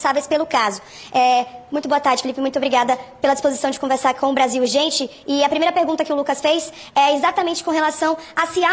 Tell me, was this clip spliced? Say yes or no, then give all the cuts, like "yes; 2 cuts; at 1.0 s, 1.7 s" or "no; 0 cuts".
no; 0 cuts